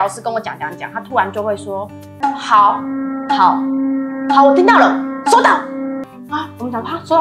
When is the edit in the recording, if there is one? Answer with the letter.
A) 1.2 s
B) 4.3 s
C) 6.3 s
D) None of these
D